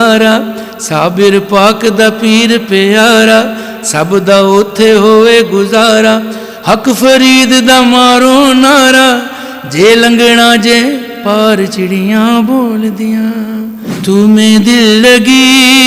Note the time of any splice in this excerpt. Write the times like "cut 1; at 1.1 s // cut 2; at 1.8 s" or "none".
cut 1; at 13.8 s